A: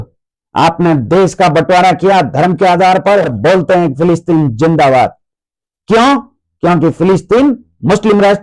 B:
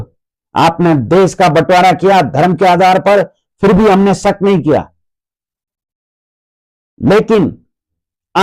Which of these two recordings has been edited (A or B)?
A